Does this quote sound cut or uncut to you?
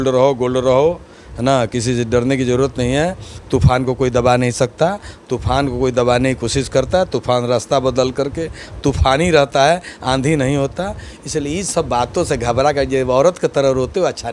uncut